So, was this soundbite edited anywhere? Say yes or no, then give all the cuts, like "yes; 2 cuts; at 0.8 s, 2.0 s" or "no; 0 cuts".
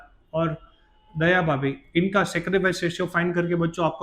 no; 0 cuts